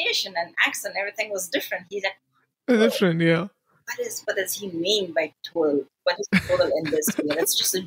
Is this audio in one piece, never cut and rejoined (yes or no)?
yes